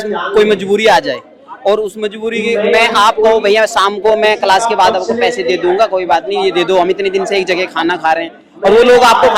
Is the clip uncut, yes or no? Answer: yes